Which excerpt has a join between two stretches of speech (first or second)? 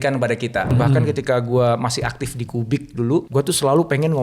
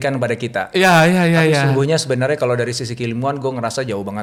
first